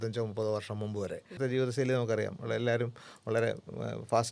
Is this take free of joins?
no; 1 cut; at 1.4 s

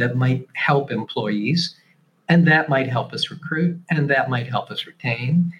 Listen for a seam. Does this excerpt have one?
no; 0 cuts

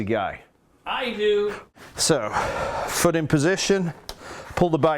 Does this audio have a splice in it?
yes; 1 cut; at 1.7 s

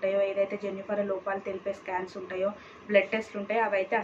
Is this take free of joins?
yes; 0 cuts

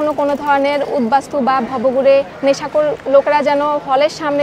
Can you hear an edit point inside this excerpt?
no; 0 cuts

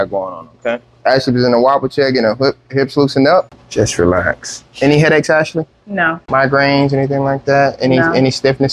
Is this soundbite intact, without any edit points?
no; 2 cuts; at 3.6 s, 6.2 s

